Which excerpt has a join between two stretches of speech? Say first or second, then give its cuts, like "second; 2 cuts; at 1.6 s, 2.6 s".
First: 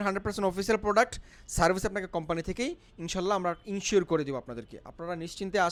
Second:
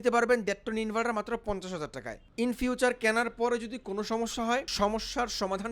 second; 2 cuts; at 2.3 s, 4.7 s